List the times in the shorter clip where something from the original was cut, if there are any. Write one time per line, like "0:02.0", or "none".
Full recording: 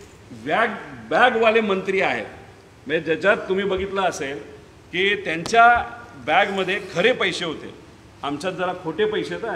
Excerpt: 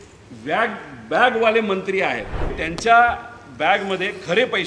0:02.6